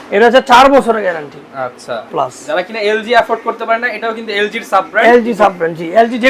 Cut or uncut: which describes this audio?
cut